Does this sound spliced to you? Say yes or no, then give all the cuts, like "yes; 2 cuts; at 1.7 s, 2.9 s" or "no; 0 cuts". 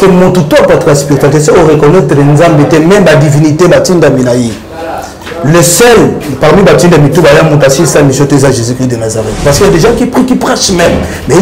yes; 1 cut; at 9.4 s